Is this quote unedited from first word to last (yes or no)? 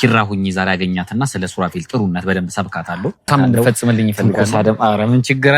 no